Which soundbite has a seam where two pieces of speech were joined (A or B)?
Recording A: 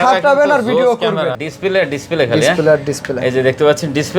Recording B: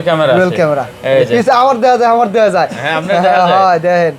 A